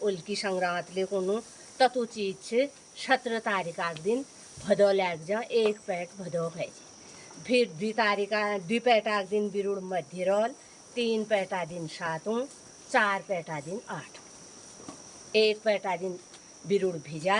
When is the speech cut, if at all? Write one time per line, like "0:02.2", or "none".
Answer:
none

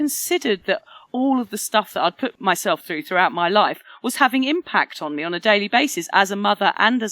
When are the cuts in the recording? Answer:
0:02.3

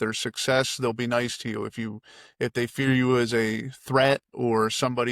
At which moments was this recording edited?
none

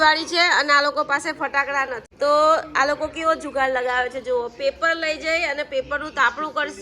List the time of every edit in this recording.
0:02.0

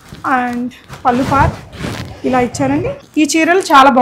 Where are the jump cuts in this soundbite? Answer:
0:03.0

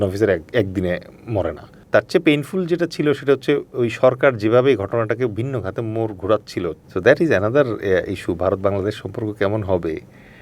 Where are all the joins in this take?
0:01.8
0:06.8

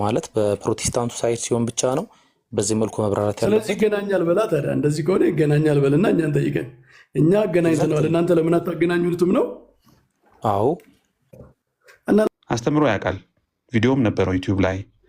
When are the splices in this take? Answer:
0:12.3

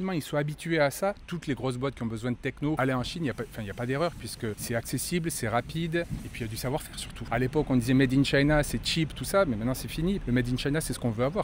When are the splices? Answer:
0:01.2
0:02.8
0:07.3
0:10.2

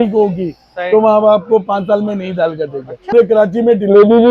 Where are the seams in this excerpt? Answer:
0:03.1

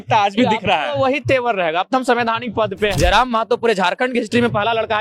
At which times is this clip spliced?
0:02.9

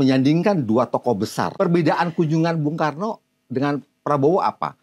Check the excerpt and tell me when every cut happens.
0:01.5

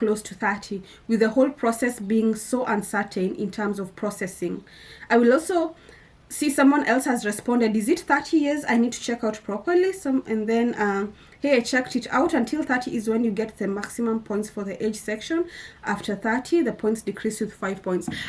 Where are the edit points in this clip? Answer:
none

